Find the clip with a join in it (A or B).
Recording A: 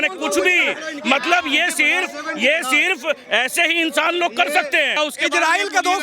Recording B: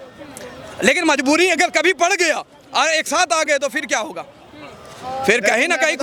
A